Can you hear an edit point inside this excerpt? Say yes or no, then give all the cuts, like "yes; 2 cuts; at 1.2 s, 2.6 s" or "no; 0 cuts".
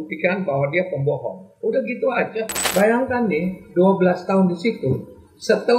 yes; 1 cut; at 2.6 s